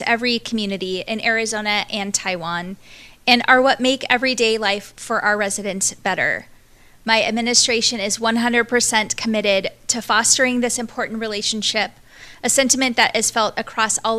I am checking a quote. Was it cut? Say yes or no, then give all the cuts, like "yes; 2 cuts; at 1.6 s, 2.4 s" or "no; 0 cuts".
no; 0 cuts